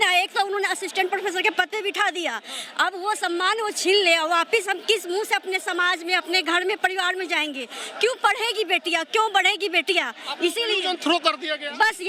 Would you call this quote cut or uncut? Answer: uncut